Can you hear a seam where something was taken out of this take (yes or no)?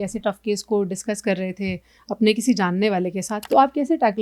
yes